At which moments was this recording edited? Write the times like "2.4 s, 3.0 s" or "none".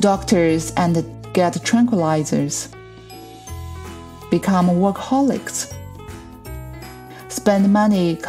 2.6 s, 4.3 s